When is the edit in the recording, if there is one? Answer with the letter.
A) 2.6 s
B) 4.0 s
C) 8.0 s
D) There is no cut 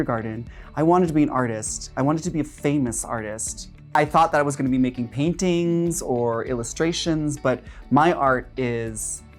B